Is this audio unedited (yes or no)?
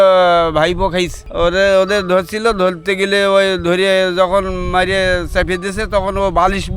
no